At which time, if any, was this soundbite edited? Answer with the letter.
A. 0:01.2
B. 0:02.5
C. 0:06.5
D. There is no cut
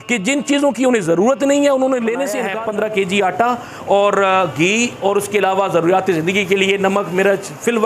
B